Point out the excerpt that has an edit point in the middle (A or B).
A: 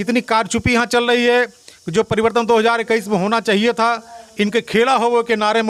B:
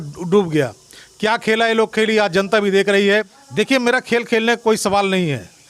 B